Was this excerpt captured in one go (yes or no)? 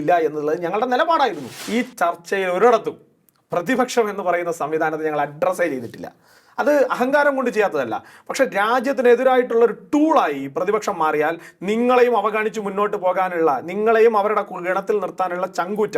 no